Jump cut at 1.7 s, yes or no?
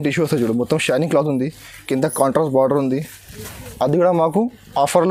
no